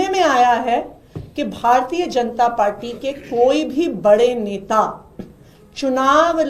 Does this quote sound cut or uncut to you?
uncut